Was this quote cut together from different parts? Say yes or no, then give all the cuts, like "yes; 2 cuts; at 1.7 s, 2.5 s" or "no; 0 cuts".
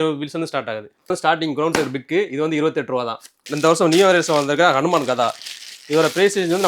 yes; 2 cuts; at 0.9 s, 3.5 s